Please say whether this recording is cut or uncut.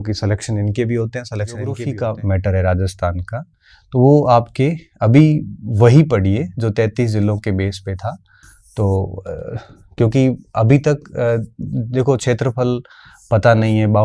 cut